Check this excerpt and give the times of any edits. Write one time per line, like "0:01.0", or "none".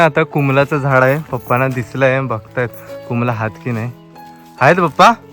none